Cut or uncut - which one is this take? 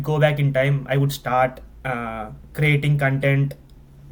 uncut